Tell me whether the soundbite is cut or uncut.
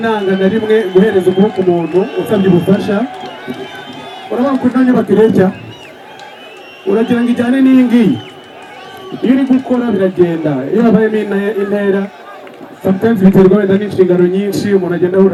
uncut